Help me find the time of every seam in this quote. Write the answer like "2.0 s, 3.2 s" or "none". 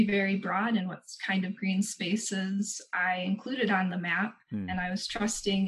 none